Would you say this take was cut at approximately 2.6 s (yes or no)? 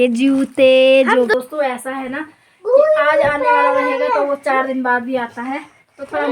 no